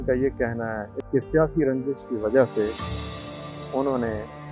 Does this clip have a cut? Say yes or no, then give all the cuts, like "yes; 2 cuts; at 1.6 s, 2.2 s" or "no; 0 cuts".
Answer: yes; 1 cut; at 0.9 s